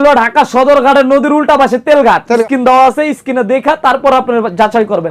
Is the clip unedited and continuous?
no; 1 cut; at 2.4 s

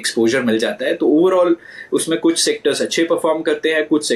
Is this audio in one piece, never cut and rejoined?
yes; 0 cuts

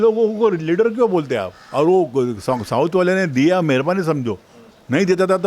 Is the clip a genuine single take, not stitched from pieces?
no; 1 cut; at 1.6 s

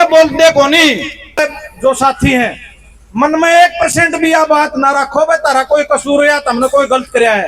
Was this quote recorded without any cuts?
no; 1 cut; at 1.4 s

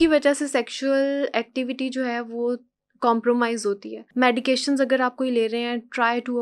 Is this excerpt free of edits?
no; 1 cut; at 4.0 s

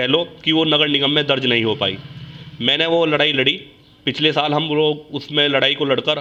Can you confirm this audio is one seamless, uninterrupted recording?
yes; 0 cuts

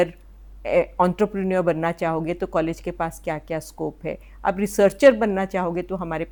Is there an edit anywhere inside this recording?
no; 0 cuts

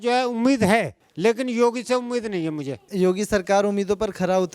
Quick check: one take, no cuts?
no; 2 cuts; at 1.0 s, 2.8 s

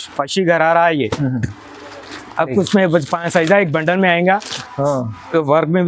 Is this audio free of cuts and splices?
no; 1 cut; at 4.6 s

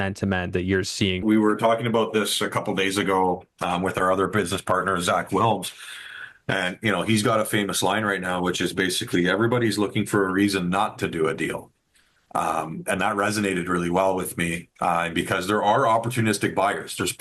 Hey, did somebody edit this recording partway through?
yes; 1 cut; at 1.2 s

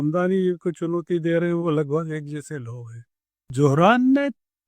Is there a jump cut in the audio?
yes; 1 cut; at 3.5 s

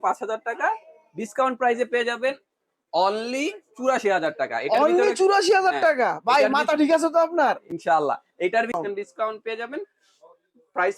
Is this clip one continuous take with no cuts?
no; 1 cut; at 8.8 s

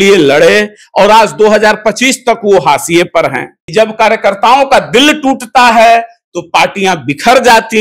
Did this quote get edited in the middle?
yes; 1 cut; at 3.6 s

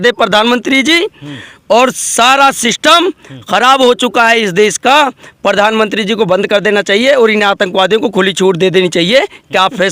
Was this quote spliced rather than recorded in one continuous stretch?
no; 0 cuts

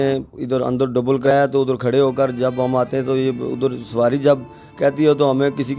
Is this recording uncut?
no; 1 cut; at 1.3 s

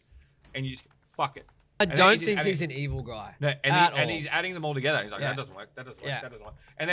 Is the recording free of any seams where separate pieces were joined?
no; 1 cut; at 1.8 s

